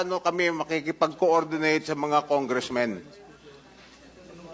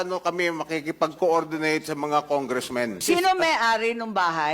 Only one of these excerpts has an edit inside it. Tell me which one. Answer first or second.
second